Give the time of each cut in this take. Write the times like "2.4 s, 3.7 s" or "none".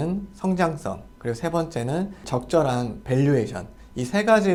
none